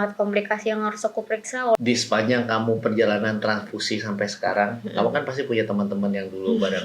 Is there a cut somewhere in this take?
yes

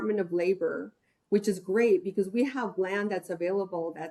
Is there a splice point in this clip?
no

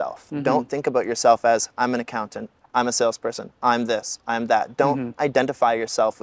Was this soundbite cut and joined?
no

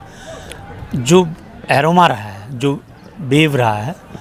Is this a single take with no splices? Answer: yes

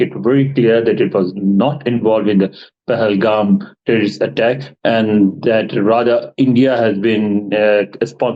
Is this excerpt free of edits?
yes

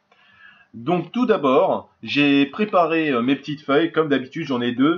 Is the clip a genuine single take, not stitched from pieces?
no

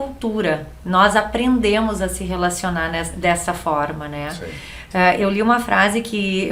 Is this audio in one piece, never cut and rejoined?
yes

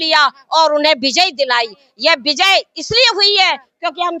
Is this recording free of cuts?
yes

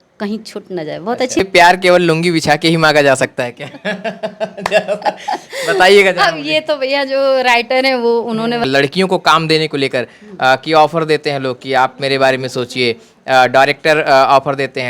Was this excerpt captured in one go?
no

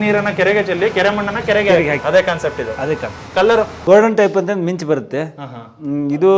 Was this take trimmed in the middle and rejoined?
yes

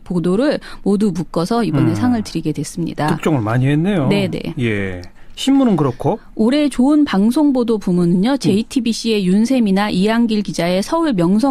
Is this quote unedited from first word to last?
no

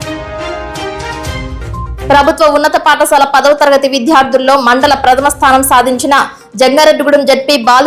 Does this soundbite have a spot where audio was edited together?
yes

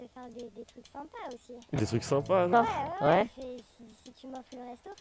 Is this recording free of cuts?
yes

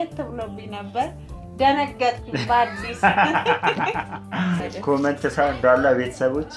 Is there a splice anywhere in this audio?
yes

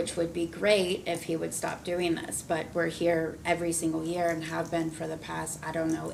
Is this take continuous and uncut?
yes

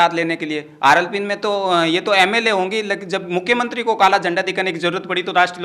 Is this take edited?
no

